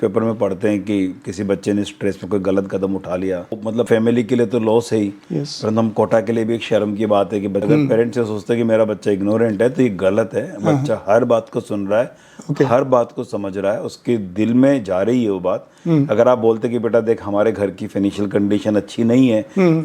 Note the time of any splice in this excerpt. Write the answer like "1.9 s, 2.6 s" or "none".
3.6 s, 7.6 s